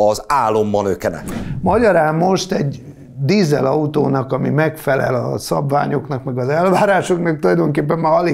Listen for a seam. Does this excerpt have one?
yes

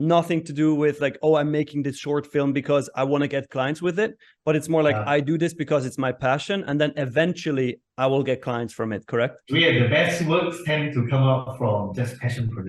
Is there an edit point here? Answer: yes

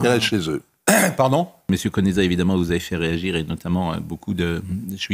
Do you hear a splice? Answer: yes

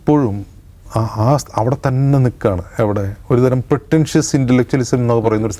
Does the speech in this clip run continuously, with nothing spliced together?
yes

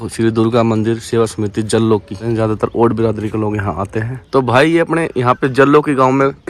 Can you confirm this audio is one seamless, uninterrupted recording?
no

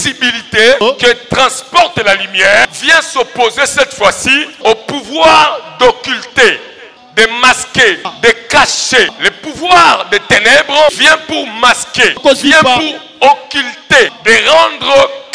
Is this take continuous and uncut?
no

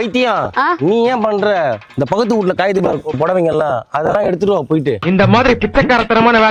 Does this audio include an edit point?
no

